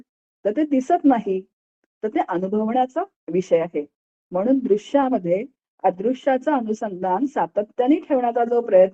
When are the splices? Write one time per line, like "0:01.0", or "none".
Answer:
none